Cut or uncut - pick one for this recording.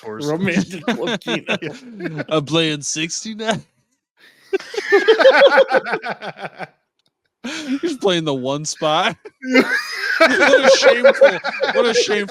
uncut